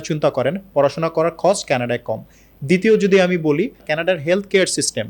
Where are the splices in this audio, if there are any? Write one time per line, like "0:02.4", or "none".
0:03.9